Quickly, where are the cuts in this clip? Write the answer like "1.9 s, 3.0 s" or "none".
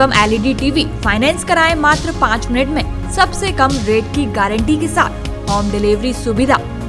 none

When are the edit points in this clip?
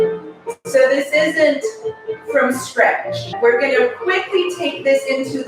3.3 s

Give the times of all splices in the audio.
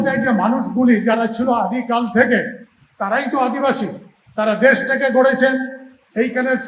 none

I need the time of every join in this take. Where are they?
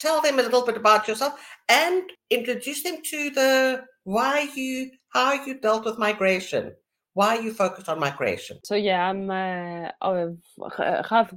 2.2 s, 8.6 s

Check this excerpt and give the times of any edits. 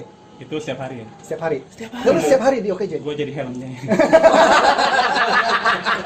none

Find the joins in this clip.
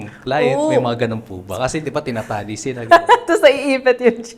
none

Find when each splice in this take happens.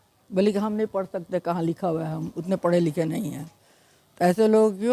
none

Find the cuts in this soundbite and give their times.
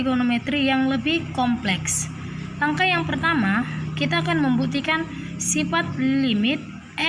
none

